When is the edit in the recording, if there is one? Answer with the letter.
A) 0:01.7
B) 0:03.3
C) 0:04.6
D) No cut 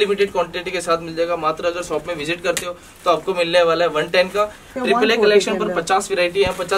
C